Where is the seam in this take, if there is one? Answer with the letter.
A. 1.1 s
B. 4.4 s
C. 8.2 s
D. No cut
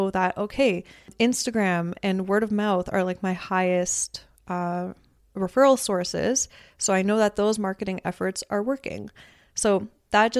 A